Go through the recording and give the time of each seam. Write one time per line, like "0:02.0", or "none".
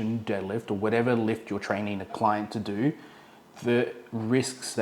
0:02.1

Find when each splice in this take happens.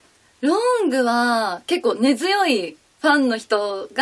0:01.6

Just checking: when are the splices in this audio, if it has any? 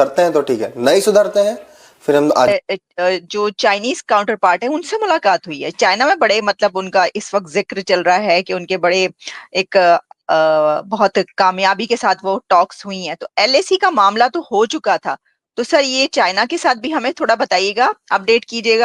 0:02.5

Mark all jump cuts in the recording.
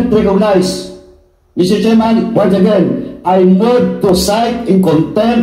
none

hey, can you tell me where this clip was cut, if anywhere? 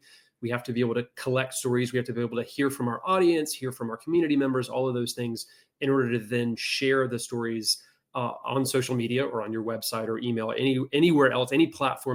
none

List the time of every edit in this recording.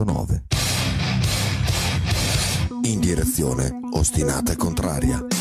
none

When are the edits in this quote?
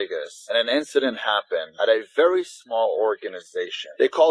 none

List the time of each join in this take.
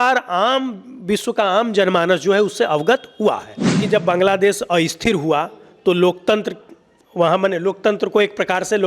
0:03.8

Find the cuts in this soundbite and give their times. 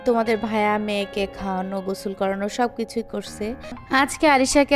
0:03.8

